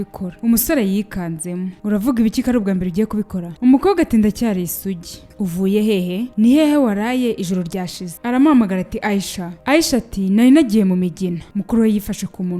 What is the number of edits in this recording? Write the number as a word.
one